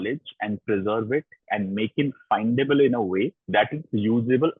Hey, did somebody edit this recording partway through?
no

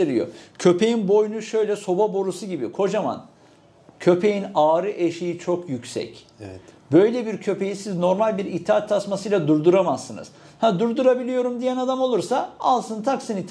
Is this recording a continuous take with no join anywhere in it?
yes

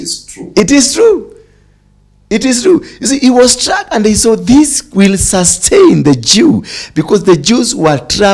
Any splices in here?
no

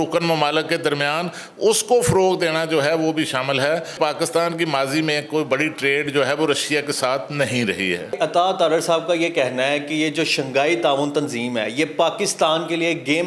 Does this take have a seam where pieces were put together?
yes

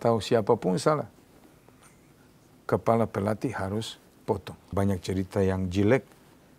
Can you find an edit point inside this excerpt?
yes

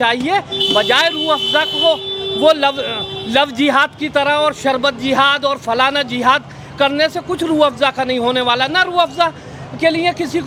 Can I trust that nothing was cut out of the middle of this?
yes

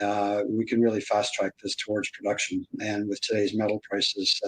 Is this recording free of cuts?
no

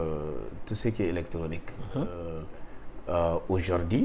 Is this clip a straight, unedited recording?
no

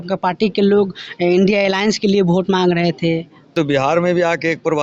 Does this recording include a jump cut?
yes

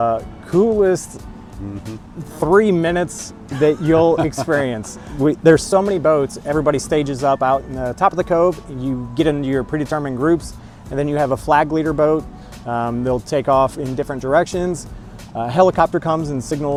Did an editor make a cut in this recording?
no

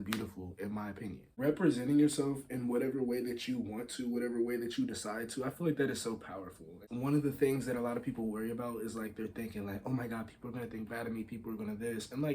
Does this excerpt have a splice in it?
yes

